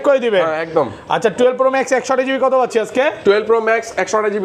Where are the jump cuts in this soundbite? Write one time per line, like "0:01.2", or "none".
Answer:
none